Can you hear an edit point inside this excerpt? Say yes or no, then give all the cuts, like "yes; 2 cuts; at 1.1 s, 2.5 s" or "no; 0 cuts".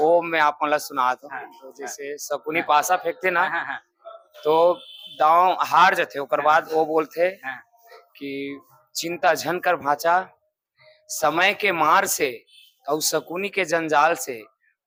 no; 0 cuts